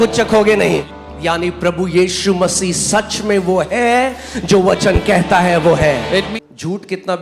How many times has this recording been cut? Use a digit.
2